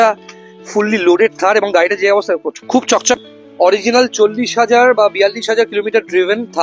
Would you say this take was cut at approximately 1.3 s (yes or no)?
no